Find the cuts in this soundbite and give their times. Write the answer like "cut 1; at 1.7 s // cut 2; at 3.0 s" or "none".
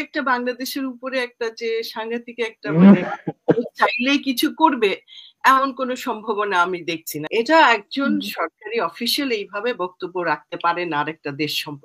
cut 1; at 7.1 s